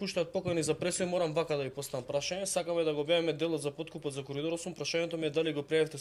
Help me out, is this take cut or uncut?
uncut